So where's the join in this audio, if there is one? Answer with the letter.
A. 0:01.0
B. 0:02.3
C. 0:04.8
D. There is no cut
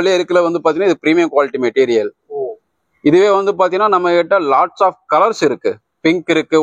D